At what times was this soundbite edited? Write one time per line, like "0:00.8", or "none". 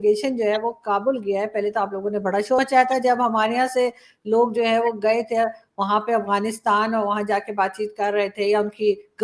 none

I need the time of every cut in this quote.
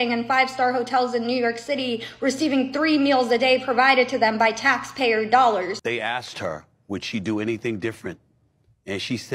0:05.8

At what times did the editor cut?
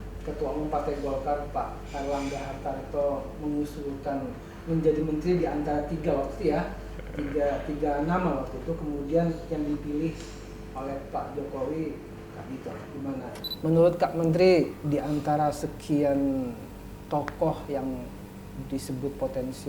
0:13.3

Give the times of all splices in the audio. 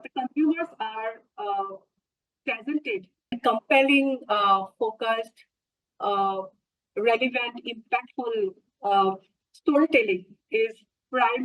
0:03.3

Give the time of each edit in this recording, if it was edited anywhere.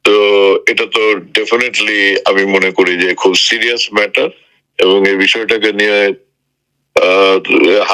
none

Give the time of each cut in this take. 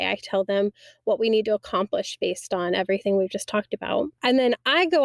0:04.1

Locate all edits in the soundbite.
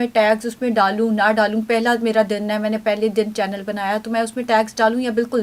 none

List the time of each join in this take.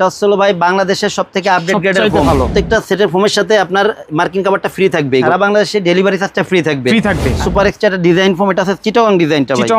0:02.3
0:05.2
0:07.4

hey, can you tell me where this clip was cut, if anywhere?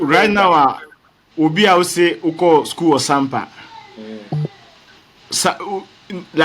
none

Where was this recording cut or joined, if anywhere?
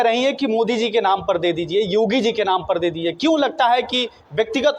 none

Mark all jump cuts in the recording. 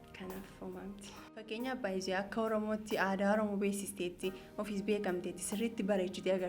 0:01.5

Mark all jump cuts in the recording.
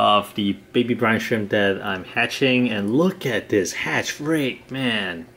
none

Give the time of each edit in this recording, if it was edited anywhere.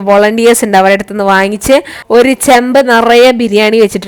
0:01.9

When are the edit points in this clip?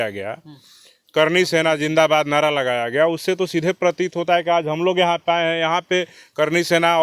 none

